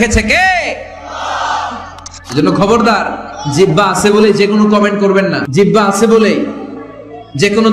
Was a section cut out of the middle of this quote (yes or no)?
yes